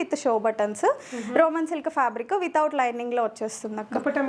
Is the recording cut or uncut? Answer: uncut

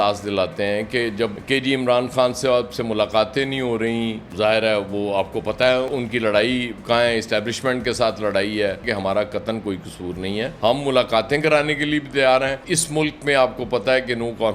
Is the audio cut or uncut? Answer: cut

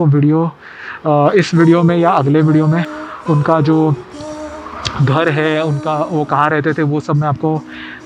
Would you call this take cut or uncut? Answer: uncut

